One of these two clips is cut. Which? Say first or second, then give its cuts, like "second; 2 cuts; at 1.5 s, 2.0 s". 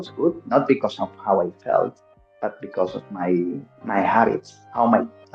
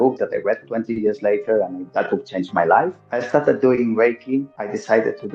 second; 2 cuts; at 1.8 s, 3.0 s